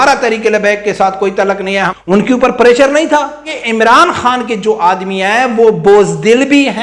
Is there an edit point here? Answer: yes; 2 cuts; at 1.9 s, 3.5 s

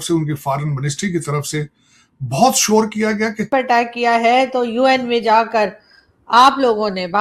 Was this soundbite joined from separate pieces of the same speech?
yes; 1 cut; at 3.5 s

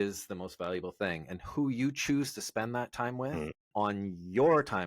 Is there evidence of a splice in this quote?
yes; 1 cut; at 3.6 s

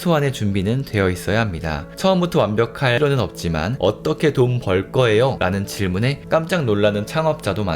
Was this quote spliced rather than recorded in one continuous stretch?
yes; 2 cuts; at 3.0 s, 5.4 s

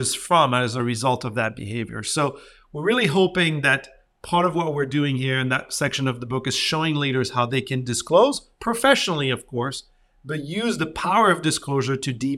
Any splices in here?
no; 0 cuts

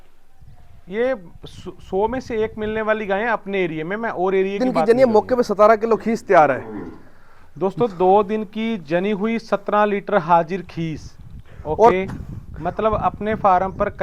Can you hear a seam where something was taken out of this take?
yes; 1 cut; at 4.7 s

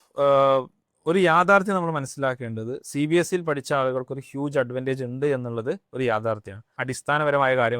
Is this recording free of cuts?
no; 1 cut; at 6.8 s

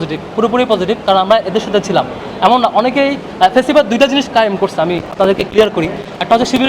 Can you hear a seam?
no; 0 cuts

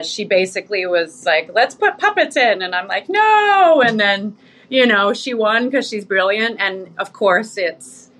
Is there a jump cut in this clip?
yes; 1 cut; at 1.1 s

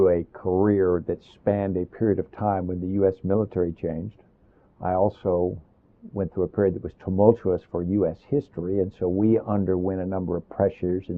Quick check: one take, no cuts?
yes; 0 cuts

